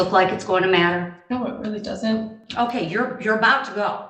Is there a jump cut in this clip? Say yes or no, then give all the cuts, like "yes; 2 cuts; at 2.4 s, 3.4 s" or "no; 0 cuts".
yes; 2 cuts; at 1.2 s, 2.4 s